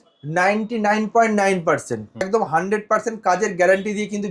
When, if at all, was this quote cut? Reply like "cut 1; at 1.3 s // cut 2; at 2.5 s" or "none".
cut 1; at 2.3 s